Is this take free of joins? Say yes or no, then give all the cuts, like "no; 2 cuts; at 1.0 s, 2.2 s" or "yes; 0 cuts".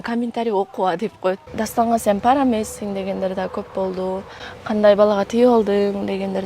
no; 2 cuts; at 1.5 s, 4.4 s